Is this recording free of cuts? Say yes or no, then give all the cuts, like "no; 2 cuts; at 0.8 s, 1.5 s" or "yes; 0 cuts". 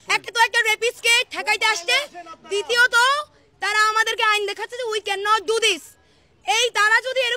yes; 0 cuts